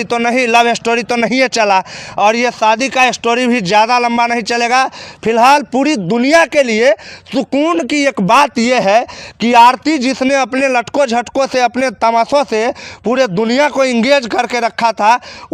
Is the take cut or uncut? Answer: uncut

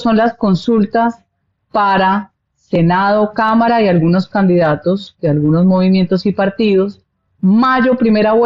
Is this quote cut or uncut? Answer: uncut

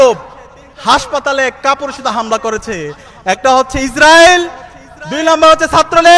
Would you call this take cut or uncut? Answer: uncut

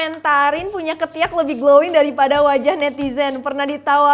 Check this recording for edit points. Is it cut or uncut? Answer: uncut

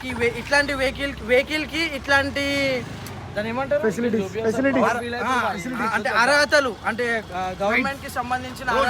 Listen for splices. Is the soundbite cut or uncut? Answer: uncut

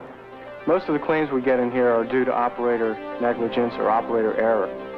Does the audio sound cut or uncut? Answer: uncut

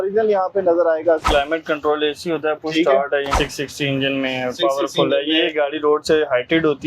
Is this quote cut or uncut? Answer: cut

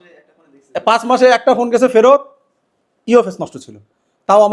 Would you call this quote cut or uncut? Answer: uncut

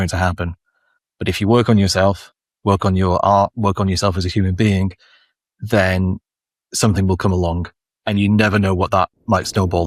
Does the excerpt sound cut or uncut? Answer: uncut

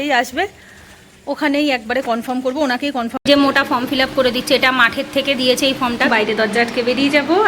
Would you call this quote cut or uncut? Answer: cut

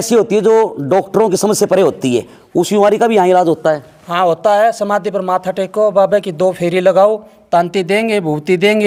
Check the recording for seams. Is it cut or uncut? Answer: uncut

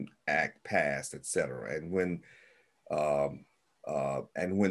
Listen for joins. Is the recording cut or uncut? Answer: uncut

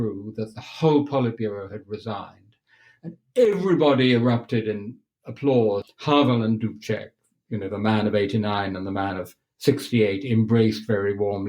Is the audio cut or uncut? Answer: cut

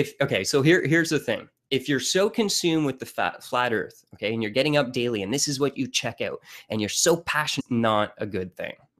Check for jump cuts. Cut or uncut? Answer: uncut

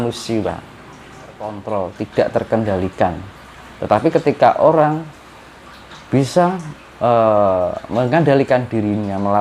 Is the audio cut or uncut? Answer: cut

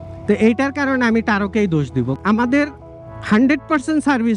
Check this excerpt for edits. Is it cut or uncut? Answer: cut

